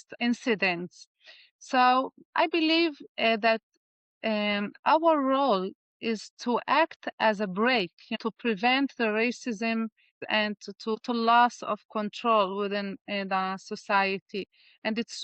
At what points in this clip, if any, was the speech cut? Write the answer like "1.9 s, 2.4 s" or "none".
11.0 s

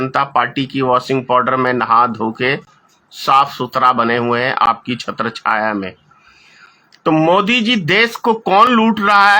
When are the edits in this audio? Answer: none

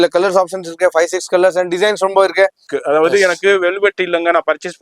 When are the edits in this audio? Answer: 2.7 s

